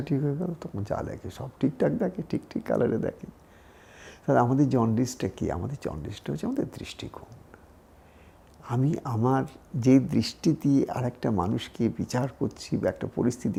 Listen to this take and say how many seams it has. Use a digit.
0